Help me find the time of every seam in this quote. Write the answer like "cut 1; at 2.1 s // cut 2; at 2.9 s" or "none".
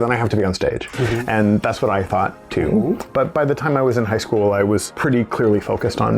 cut 1; at 3.1 s // cut 2; at 4.9 s